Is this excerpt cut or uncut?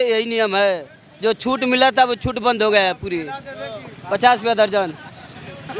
uncut